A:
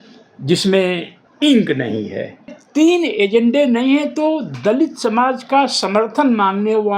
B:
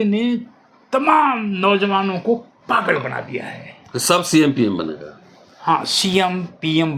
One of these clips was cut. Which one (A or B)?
A